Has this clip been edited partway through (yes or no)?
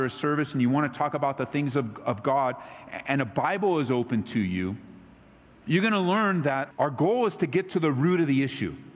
yes